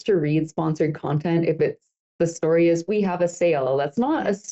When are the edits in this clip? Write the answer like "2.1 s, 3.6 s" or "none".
none